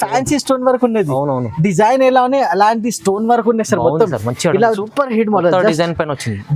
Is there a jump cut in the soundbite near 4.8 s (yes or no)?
yes